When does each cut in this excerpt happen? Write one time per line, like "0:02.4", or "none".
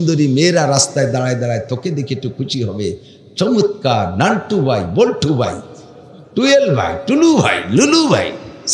none